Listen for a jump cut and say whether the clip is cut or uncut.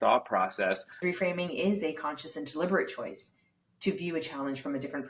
cut